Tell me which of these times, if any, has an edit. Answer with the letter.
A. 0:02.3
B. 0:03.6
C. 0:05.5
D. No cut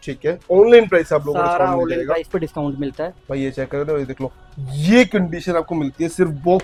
D